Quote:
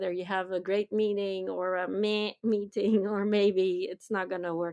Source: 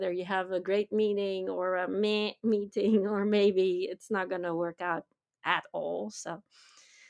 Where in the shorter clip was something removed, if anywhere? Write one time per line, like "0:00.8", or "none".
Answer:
none